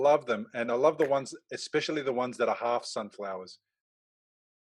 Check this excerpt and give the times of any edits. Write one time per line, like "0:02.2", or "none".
none

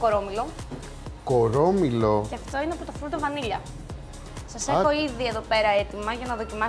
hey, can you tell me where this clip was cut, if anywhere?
none

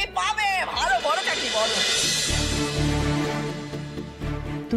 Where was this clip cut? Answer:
0:01.9

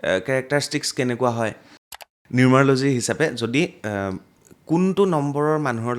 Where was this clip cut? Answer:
0:01.8

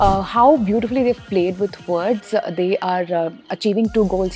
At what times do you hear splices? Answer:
0:03.5

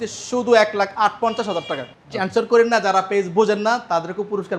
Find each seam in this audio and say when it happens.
0:01.9

